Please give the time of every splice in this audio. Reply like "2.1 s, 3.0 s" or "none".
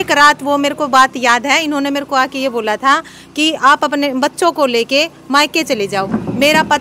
none